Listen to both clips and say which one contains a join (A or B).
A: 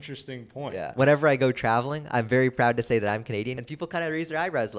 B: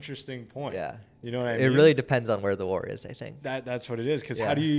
A